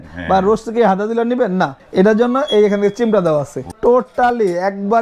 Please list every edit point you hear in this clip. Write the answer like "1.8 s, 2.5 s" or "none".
1.8 s, 3.7 s